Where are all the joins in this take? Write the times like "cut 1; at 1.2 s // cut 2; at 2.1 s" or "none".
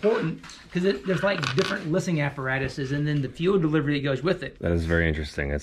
cut 1; at 4.5 s